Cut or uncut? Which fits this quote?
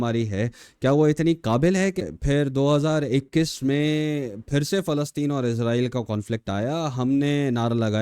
cut